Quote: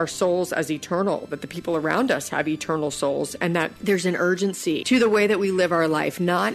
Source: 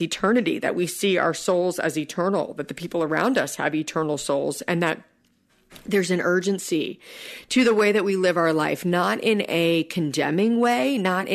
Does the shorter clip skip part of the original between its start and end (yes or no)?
yes